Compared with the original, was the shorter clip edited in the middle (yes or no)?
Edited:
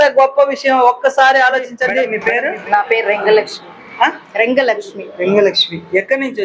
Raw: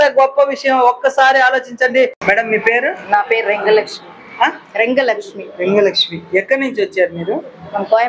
yes